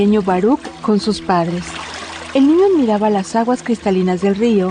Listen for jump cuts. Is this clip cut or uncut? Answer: uncut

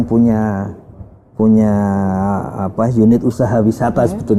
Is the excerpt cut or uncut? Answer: uncut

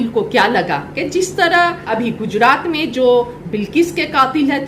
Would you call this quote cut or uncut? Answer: cut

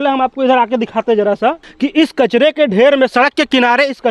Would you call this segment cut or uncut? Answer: cut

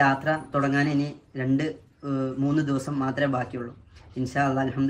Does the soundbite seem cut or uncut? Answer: uncut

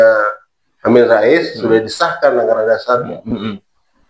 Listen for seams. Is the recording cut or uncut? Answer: uncut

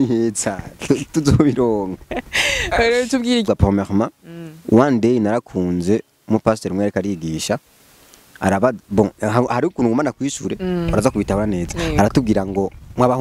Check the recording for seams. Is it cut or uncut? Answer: cut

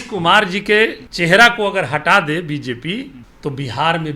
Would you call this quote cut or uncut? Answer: cut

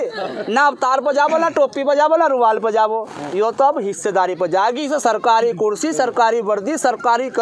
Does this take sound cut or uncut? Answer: uncut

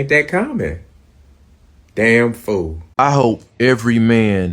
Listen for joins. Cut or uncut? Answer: cut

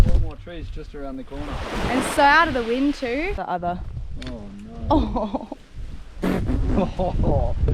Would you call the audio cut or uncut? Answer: cut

